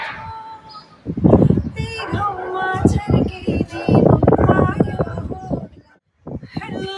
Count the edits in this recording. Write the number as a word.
one